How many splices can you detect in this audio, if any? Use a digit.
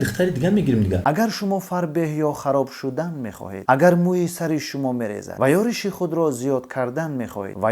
1